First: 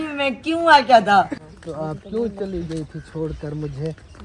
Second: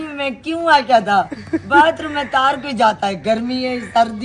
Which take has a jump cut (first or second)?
first